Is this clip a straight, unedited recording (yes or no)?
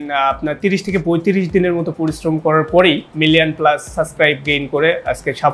no